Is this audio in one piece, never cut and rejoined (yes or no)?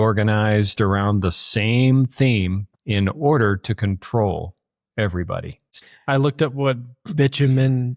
no